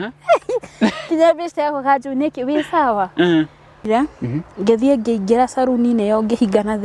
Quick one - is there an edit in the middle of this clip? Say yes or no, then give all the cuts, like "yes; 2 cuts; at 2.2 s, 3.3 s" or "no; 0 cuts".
yes; 1 cut; at 3.8 s